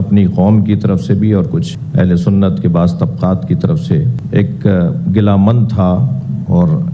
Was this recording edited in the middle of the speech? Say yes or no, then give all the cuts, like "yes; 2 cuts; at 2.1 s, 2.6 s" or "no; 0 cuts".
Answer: no; 0 cuts